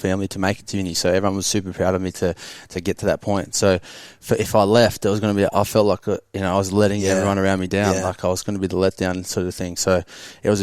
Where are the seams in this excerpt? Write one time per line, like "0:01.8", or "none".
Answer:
none